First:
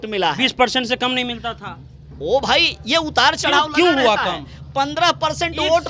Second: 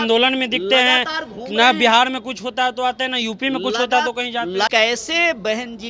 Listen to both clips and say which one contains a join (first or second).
second